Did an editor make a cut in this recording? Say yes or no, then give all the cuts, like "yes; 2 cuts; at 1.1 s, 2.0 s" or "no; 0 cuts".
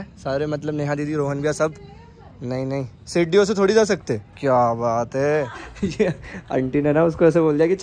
yes; 1 cut; at 5.6 s